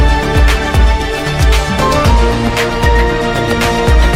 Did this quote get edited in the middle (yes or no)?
no